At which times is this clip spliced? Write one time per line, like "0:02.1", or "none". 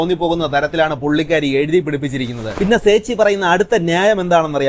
0:02.5